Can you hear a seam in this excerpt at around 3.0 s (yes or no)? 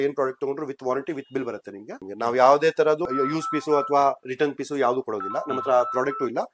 yes